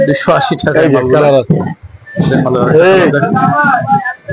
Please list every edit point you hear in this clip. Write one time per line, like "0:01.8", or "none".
none